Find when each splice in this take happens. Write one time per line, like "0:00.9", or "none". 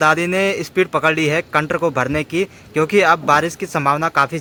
none